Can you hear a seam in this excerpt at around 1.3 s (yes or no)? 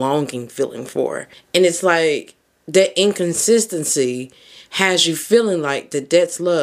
yes